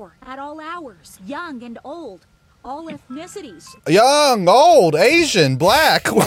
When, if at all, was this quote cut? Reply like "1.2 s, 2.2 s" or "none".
1.1 s, 3.7 s